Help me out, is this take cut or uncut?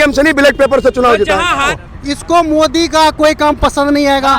cut